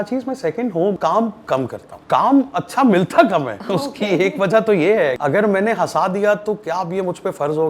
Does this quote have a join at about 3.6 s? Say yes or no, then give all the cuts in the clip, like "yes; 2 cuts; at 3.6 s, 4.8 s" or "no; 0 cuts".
yes; 4 cuts; at 1.0 s, 1.9 s, 3.6 s, 5.2 s